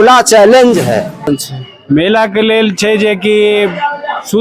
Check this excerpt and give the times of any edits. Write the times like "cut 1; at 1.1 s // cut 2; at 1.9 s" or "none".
cut 1; at 1.3 s